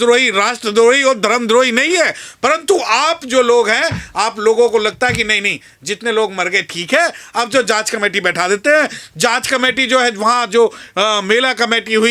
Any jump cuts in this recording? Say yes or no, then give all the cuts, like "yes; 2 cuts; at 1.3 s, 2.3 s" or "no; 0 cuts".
no; 0 cuts